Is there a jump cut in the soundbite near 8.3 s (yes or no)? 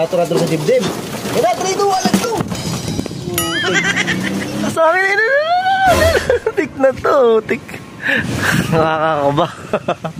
yes